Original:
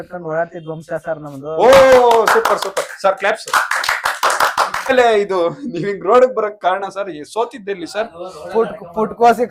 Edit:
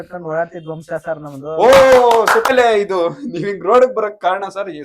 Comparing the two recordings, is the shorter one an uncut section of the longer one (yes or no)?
no